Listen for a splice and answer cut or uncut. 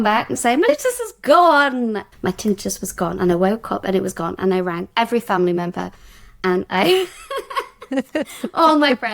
cut